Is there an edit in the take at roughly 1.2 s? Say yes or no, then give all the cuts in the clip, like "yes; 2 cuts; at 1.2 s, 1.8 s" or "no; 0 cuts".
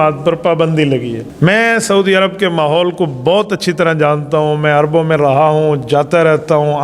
yes; 1 cut; at 1.2 s